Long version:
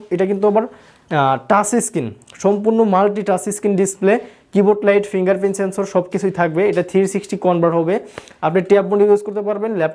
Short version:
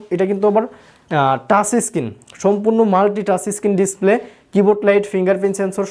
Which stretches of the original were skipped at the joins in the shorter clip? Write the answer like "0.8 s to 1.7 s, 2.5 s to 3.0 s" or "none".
none